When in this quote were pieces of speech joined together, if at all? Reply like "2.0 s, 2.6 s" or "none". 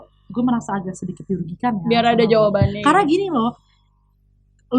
none